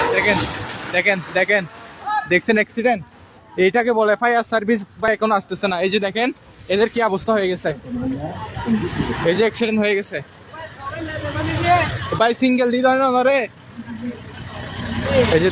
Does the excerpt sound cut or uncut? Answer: cut